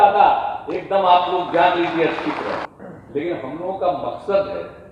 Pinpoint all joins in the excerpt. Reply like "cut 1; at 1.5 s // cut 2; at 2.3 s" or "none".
cut 1; at 2.7 s